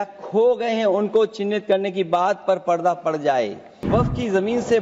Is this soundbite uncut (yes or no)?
no